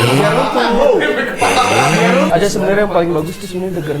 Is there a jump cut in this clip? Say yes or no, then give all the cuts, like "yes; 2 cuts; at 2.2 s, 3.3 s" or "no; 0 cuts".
yes; 1 cut; at 2.3 s